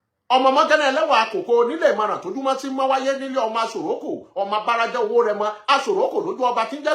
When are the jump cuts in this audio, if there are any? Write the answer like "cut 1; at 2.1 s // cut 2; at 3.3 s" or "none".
none